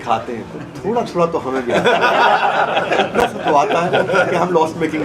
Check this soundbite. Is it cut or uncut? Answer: uncut